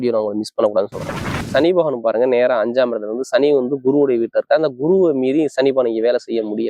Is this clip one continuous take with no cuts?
no; 1 cut; at 1.4 s

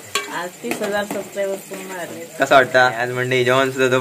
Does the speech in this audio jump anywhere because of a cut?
yes; 1 cut; at 3.0 s

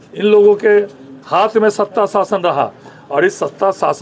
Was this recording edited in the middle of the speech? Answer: no; 0 cuts

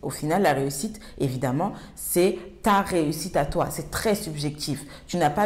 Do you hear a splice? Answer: no; 0 cuts

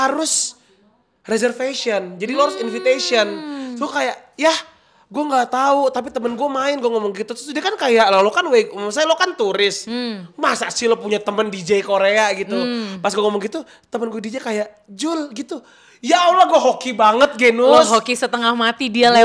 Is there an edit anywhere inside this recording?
no; 0 cuts

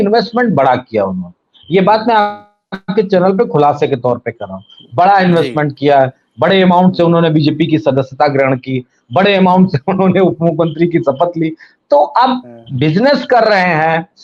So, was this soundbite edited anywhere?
no; 0 cuts

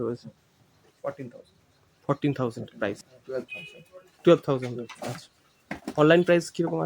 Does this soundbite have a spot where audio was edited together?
yes; 1 cut; at 3.1 s

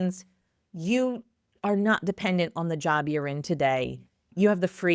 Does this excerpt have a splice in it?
no; 0 cuts

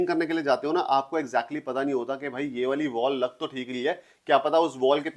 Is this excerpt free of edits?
yes; 0 cuts

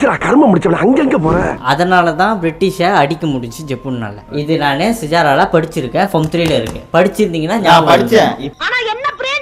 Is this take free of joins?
no; 1 cut; at 1.5 s

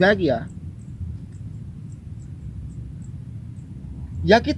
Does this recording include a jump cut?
no; 0 cuts

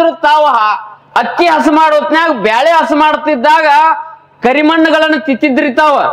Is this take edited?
no; 0 cuts

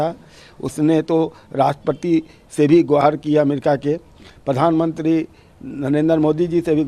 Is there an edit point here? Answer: no; 0 cuts

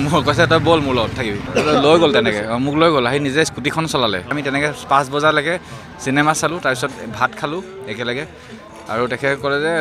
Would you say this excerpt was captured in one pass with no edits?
no; 2 cuts; at 1.4 s, 4.4 s

